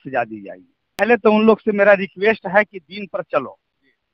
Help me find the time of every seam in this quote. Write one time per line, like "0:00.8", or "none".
0:01.0